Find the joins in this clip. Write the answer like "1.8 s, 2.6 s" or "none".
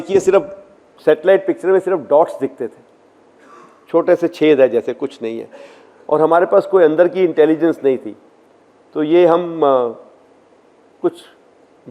none